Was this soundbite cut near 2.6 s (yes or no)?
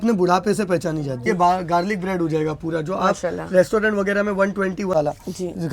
no